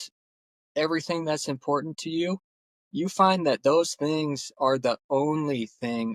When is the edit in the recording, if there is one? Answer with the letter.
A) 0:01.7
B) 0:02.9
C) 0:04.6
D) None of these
D